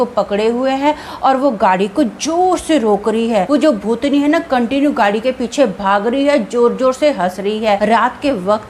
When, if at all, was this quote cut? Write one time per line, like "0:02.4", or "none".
0:03.5
0:07.8